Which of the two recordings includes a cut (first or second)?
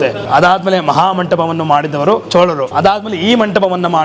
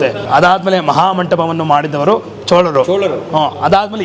first